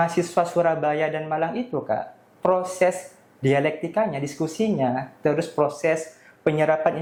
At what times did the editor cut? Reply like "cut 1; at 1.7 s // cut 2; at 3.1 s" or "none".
none